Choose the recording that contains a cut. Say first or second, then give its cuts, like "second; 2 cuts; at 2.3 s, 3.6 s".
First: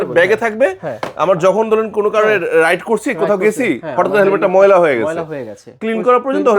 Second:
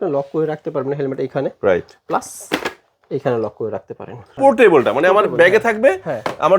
second; 1 cut; at 4.3 s